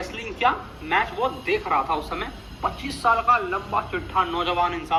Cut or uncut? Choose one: uncut